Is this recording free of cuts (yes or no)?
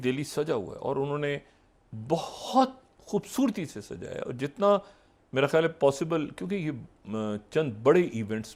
yes